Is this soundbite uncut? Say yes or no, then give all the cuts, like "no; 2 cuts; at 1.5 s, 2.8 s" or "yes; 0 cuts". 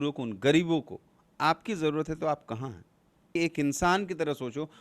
no; 1 cut; at 3.3 s